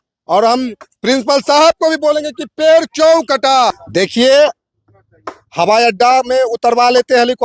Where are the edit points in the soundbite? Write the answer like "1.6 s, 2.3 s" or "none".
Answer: 3.8 s